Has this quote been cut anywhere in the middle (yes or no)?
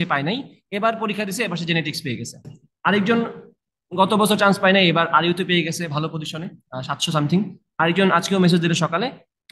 yes